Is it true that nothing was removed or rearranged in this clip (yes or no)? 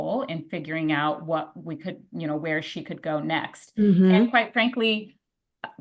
yes